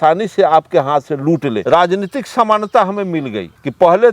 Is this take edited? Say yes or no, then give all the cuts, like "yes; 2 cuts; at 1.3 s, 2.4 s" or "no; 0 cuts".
yes; 1 cut; at 1.6 s